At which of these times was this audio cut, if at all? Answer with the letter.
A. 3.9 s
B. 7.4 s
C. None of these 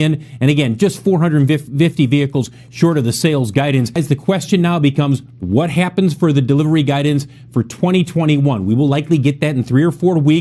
A